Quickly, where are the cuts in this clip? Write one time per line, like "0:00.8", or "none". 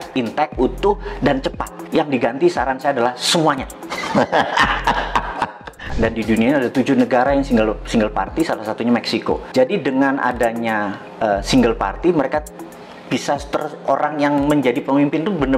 0:05.9

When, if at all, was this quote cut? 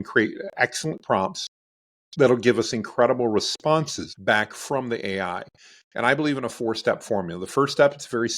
0:04.0

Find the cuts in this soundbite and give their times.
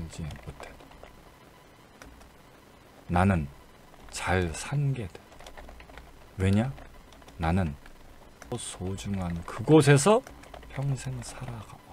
none

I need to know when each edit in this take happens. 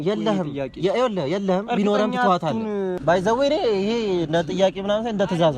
0:03.0

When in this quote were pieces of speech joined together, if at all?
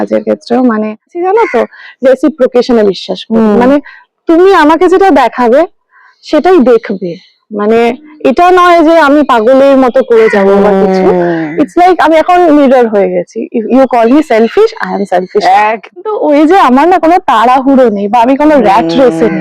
0:01.2
0:16.0

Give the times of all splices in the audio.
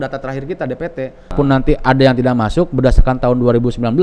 0:01.3

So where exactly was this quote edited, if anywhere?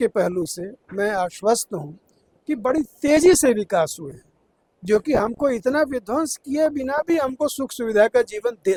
none

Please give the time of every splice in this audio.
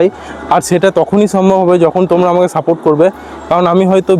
none

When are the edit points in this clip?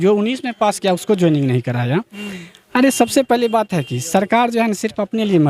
none

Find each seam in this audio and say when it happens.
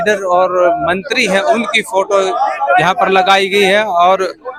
none

